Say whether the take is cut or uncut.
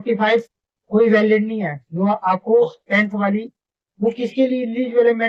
uncut